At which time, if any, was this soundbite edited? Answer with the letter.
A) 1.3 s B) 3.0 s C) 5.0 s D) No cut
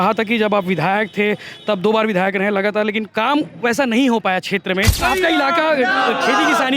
C